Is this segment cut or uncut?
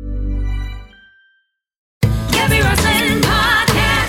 cut